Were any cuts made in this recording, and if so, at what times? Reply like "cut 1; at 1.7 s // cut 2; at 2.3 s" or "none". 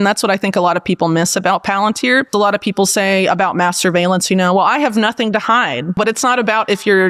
cut 1; at 2.3 s // cut 2; at 6.0 s